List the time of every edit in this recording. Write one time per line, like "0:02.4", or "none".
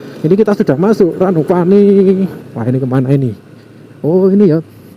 0:02.5